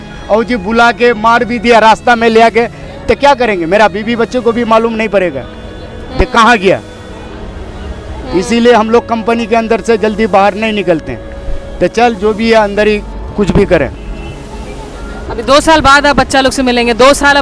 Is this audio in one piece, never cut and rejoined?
yes; 0 cuts

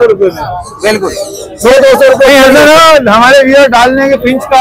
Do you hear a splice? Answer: no; 0 cuts

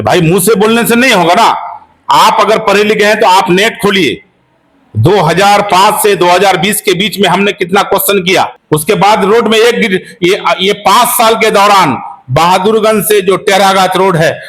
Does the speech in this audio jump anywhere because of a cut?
yes; 1 cut; at 8.6 s

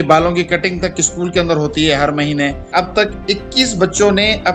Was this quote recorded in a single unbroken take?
no; 1 cut; at 2.6 s

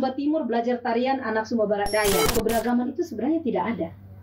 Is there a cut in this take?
yes; 1 cut; at 2.3 s

